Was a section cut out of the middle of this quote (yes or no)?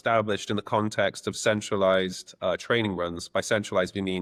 no